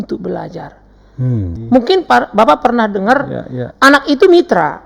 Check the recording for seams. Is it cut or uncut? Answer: cut